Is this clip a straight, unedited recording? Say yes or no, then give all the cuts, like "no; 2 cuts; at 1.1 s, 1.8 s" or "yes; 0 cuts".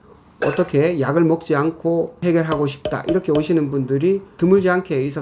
no; 2 cuts; at 2.2 s, 4.3 s